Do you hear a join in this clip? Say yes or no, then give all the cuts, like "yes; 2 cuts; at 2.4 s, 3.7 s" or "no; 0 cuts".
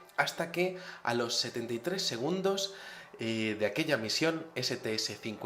yes; 1 cut; at 4.1 s